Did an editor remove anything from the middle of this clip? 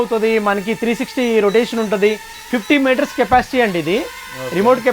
no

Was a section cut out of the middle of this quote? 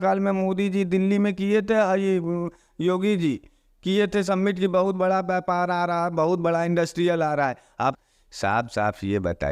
yes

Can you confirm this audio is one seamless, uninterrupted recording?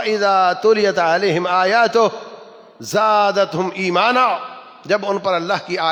yes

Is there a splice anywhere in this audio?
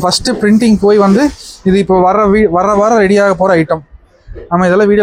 no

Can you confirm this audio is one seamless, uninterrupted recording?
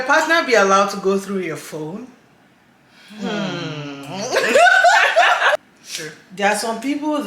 no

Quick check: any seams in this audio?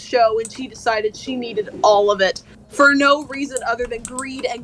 no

